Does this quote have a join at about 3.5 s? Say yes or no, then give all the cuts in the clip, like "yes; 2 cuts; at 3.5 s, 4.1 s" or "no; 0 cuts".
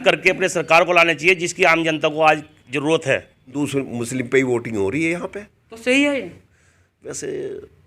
yes; 1 cut; at 3.5 s